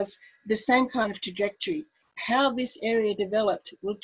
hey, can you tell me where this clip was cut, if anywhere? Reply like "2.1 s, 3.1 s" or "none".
none

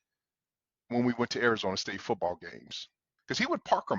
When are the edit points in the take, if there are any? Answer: 3.1 s

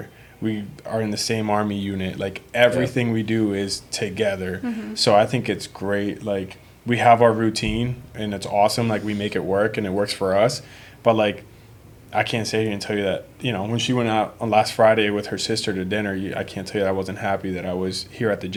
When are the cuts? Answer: none

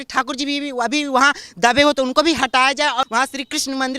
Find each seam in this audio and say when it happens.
3.0 s

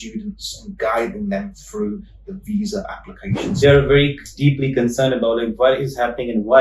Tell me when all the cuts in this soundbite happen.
3.6 s

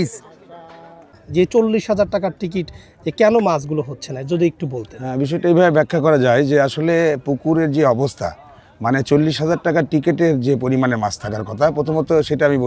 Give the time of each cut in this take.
1.2 s

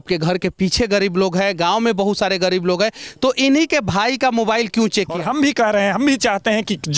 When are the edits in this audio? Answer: 5.1 s

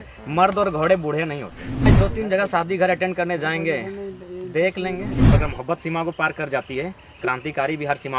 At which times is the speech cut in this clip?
1.9 s, 5.2 s

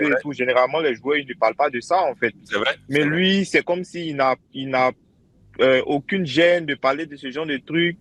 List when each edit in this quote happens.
none

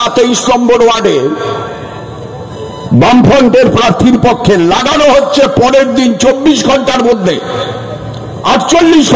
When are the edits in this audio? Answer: none

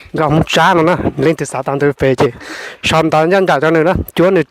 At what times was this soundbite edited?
none

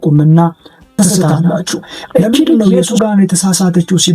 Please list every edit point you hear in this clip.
2.9 s

